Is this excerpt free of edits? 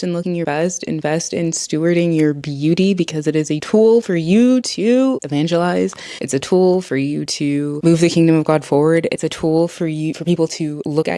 yes; 0 cuts

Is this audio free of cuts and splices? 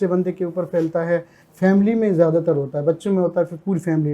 no; 1 cut; at 1.4 s

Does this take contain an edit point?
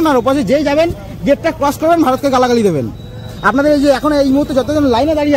no; 0 cuts

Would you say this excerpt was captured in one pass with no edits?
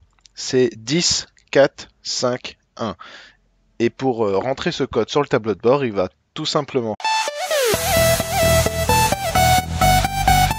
yes; 0 cuts

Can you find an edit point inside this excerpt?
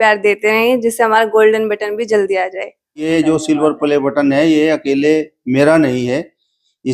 yes; 1 cut; at 3.1 s

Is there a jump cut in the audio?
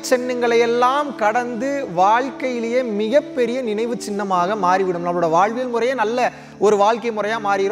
no; 0 cuts

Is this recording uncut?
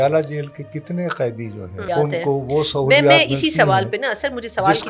no; 1 cut; at 1.9 s

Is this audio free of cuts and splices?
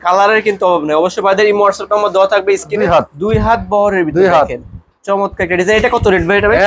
no; 1 cut; at 2.8 s

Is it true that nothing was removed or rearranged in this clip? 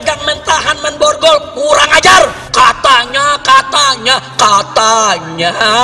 no; 1 cut; at 2.4 s

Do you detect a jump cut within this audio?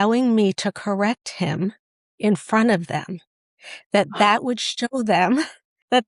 no; 0 cuts

